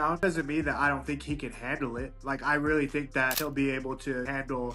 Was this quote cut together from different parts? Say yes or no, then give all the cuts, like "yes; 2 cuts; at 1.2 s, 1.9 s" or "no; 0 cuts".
no; 0 cuts